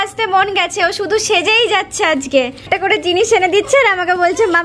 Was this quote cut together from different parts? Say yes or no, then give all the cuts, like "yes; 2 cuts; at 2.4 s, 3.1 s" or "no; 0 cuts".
yes; 1 cut; at 2.6 s